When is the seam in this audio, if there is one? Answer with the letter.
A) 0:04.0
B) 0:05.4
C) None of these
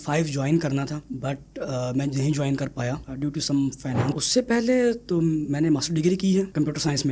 A